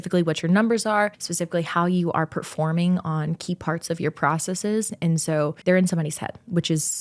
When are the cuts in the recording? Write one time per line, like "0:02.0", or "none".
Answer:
0:01.3
0:05.6

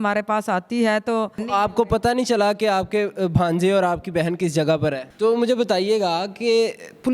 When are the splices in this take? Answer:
0:01.4
0:05.1

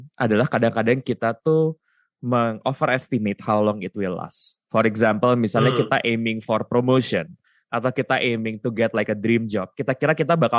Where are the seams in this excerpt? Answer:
none

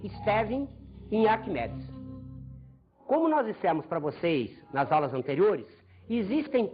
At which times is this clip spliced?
0:05.5

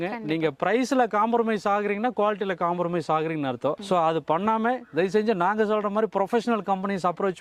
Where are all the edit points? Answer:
none

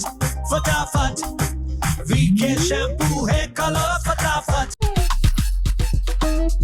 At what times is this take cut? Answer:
none

